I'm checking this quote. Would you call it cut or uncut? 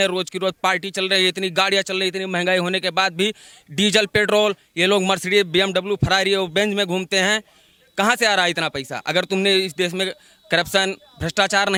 uncut